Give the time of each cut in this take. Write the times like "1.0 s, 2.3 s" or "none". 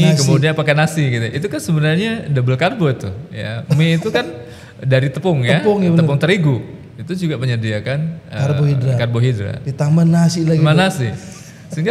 none